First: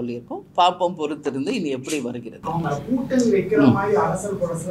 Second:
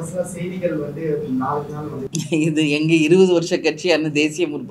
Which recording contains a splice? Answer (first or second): second